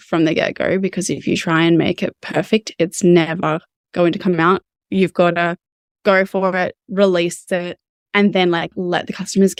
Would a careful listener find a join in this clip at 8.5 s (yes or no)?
no